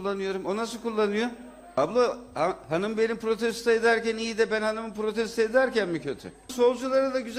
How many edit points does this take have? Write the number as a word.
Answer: two